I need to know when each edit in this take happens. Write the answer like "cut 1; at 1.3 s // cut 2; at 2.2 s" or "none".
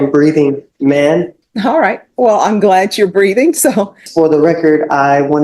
cut 1; at 1.4 s // cut 2; at 4.0 s